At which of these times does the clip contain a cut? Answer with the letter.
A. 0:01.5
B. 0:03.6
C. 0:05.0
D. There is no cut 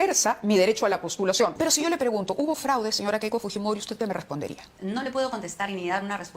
A